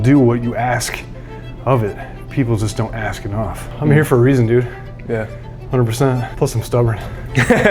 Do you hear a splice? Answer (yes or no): yes